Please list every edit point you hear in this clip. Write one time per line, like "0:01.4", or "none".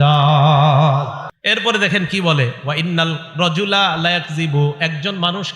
0:01.3